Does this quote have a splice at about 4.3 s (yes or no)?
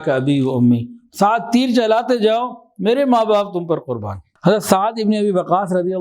yes